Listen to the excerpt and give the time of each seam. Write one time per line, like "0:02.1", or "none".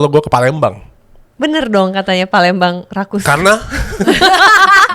none